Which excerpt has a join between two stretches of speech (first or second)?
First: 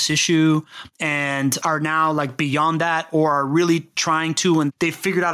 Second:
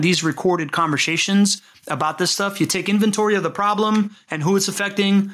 first